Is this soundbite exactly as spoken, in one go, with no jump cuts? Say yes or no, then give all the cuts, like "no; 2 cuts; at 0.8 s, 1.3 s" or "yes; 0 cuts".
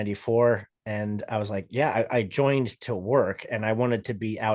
yes; 0 cuts